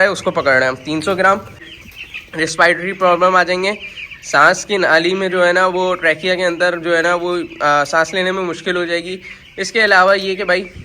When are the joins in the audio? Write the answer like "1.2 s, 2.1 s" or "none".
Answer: 1.7 s

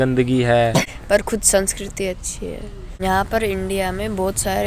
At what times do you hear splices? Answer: none

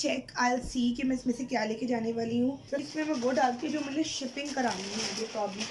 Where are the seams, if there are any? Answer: 2.6 s

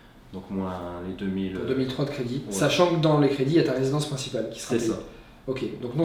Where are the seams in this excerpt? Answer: none

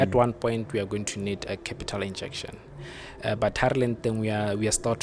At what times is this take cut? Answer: none

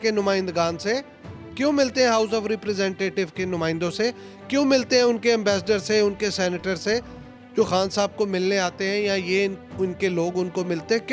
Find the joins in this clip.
none

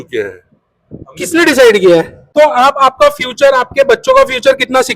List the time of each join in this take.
2.2 s

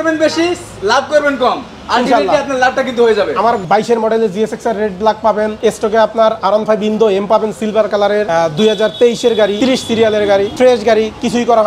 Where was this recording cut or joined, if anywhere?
3.6 s, 5.5 s, 8.3 s, 9.5 s, 10.5 s

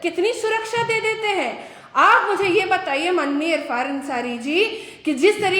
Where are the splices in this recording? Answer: none

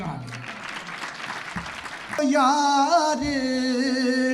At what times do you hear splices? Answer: 2.2 s

